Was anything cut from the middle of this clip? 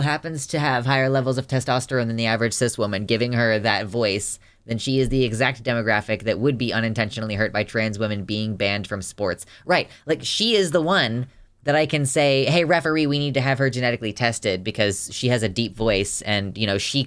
no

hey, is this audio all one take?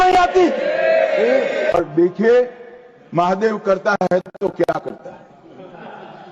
no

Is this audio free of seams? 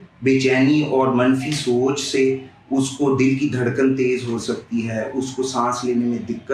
yes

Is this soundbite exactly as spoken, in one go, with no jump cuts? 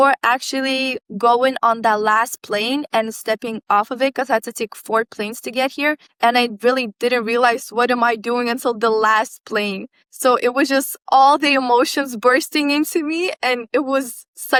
yes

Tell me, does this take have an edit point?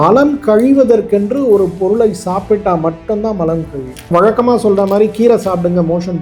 no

